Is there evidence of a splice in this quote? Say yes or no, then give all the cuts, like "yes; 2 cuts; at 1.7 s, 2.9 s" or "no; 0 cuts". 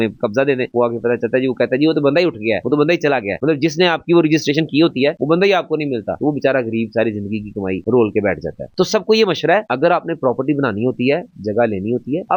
no; 0 cuts